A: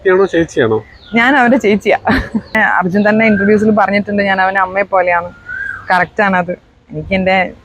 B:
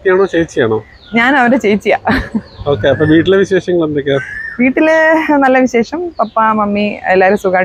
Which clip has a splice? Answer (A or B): A